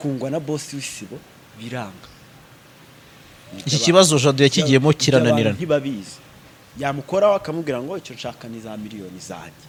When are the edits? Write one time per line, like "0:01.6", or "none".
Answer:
none